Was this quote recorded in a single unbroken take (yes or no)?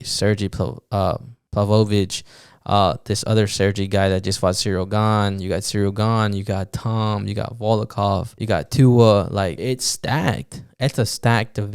no